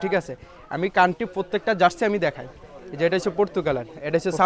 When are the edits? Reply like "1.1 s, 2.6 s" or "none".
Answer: none